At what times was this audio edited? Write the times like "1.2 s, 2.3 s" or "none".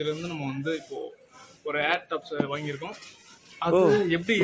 none